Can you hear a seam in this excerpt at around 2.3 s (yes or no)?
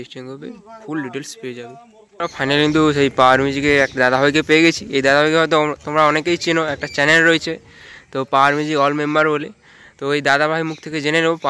yes